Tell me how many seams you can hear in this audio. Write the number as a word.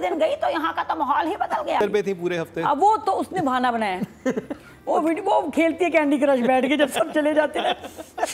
one